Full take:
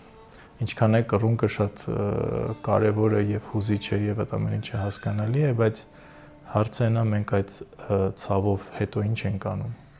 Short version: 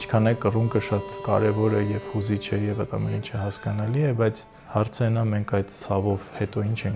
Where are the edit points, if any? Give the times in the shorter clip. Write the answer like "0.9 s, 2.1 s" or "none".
1.1 s, 4.5 s, 5.8 s